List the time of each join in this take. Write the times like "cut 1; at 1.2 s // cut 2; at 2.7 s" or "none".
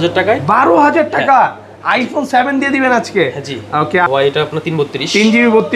cut 1; at 4.1 s